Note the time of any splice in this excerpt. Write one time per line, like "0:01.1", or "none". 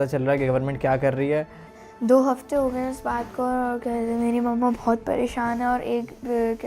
0:01.6